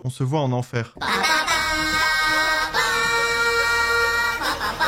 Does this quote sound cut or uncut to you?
uncut